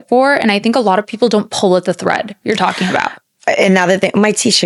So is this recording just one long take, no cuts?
yes; 0 cuts

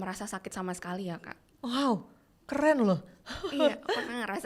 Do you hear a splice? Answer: no; 0 cuts

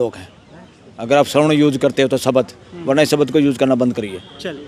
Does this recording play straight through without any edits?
yes; 0 cuts

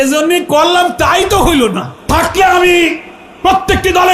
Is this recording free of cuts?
no; 1 cut; at 1.9 s

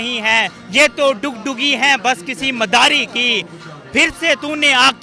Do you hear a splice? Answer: no; 0 cuts

